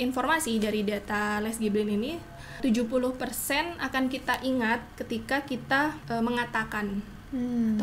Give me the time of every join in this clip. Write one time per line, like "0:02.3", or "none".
0:02.6
0:06.0